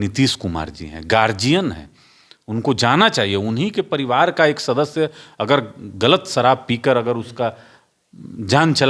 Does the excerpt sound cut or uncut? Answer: uncut